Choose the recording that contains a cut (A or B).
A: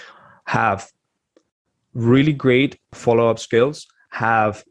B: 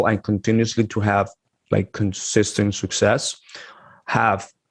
A